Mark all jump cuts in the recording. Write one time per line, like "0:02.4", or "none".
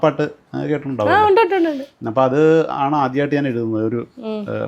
none